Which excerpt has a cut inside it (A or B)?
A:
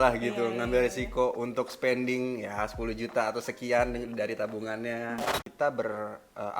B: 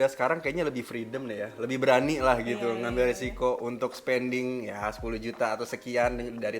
A